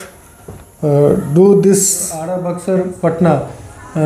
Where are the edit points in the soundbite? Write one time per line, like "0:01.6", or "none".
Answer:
0:02.4